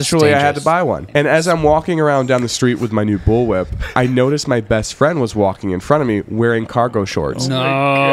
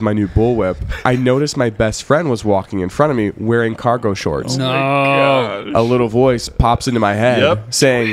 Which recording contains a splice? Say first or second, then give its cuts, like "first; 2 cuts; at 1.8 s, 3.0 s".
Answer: first; 1 cut; at 1.0 s